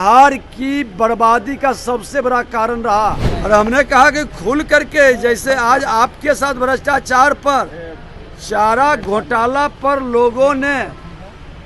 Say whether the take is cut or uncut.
cut